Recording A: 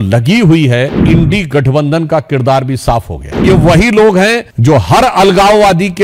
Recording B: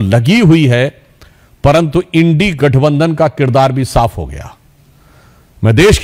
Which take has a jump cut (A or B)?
A